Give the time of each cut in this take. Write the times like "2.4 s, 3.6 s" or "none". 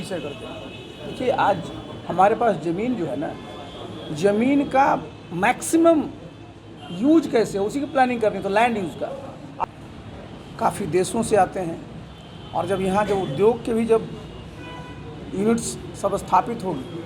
9.6 s